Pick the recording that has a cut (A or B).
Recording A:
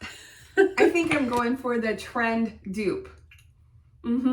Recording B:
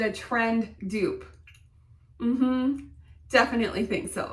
A